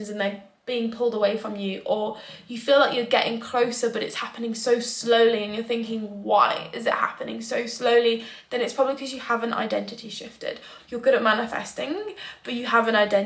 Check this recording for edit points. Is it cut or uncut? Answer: uncut